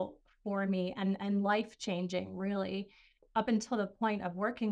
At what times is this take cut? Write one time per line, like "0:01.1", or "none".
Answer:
0:03.3